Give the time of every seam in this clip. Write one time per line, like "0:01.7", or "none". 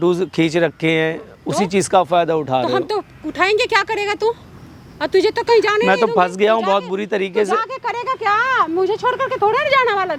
none